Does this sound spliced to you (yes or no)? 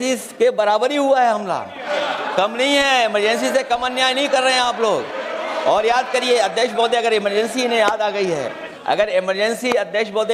yes